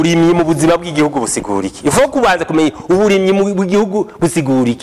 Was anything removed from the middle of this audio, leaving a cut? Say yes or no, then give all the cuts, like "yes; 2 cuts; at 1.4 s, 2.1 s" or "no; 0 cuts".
no; 0 cuts